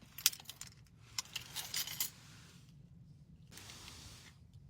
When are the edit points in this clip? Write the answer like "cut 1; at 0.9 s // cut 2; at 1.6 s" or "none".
cut 1; at 3.5 s